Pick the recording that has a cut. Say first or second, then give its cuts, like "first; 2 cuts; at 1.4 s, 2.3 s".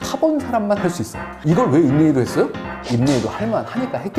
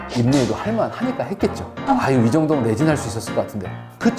first; 1 cut; at 1.3 s